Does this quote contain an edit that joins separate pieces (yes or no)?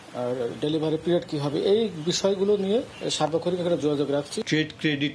yes